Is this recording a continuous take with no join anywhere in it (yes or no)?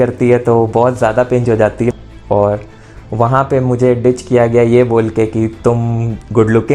no